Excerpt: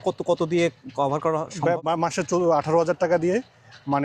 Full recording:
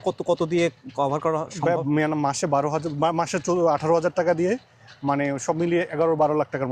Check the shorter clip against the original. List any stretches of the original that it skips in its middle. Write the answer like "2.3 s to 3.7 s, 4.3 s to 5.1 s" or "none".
1.8 s to 3.0 s